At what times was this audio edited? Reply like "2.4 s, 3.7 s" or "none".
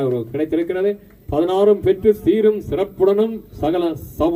none